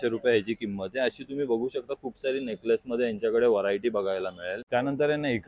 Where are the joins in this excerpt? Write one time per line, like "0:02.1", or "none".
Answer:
none